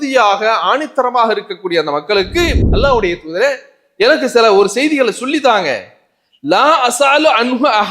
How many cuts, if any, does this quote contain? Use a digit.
1